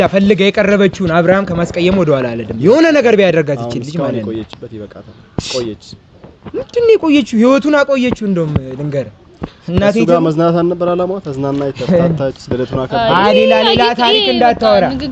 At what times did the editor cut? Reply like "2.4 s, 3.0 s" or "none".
none